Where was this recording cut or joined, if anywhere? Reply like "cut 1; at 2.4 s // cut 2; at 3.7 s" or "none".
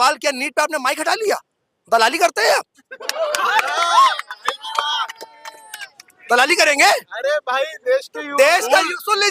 none